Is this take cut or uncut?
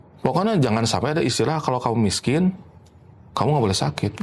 uncut